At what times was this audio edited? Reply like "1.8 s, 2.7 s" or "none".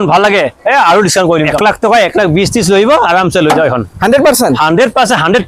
1.5 s